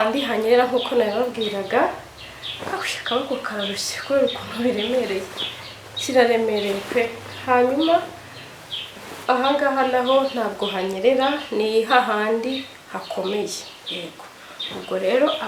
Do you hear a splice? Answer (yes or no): no